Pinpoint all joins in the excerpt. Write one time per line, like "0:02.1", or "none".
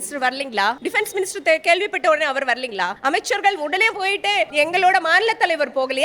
0:00.8
0:03.0
0:04.5